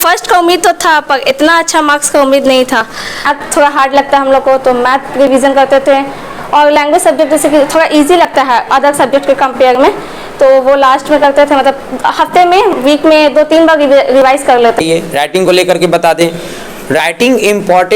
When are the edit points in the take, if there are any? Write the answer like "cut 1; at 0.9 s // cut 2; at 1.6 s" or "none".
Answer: cut 1; at 3.3 s // cut 2; at 14.8 s